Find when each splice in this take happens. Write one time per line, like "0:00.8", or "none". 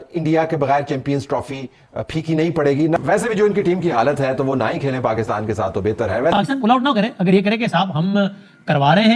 0:03.0
0:06.3